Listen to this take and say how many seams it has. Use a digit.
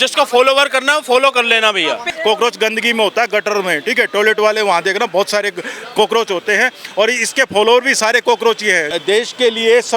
2